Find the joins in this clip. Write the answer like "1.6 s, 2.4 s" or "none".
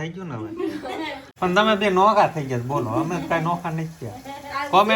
1.2 s